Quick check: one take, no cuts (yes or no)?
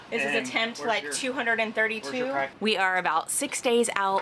no